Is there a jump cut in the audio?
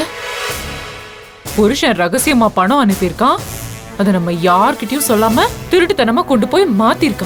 no; 0 cuts

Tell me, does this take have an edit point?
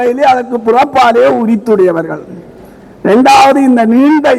no; 0 cuts

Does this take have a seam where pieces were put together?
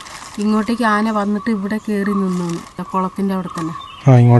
yes; 1 cut; at 2.8 s

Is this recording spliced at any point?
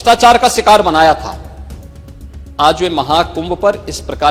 no; 0 cuts

